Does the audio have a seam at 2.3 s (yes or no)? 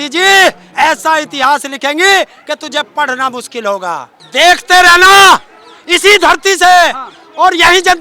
no